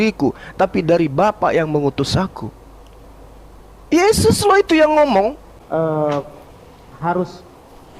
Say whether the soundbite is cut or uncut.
cut